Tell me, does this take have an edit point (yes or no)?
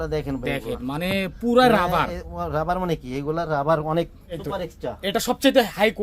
yes